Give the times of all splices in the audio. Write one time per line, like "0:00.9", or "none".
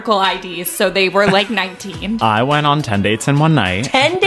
0:02.2